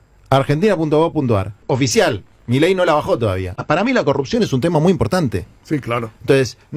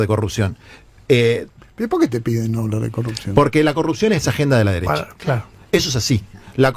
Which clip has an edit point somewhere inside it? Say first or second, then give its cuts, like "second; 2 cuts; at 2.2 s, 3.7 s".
first; 2 cuts; at 1.5 s, 3.6 s